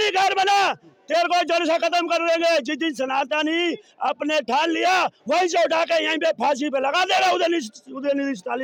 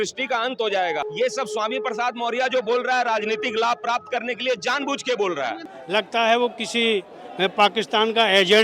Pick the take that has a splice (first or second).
second